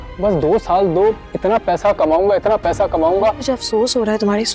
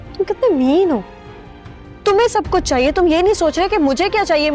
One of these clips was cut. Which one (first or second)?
first